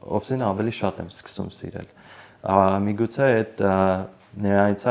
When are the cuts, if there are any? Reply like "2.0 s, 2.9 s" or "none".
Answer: none